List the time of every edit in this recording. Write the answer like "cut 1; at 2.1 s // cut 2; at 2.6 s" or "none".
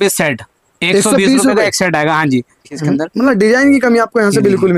cut 1; at 2.8 s